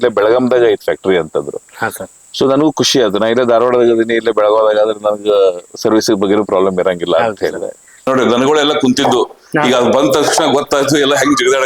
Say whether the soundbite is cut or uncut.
cut